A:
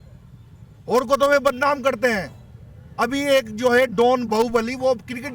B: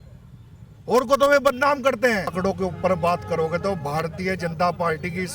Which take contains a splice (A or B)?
B